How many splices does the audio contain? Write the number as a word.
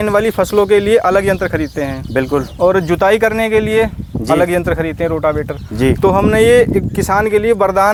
zero